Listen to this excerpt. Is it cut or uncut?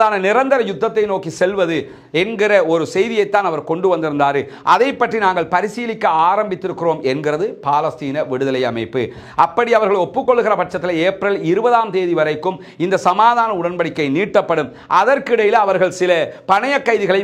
uncut